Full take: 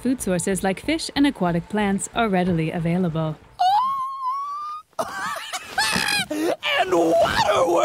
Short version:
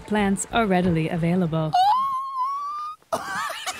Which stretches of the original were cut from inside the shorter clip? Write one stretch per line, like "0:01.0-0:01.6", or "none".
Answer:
0:03.3-0:03.5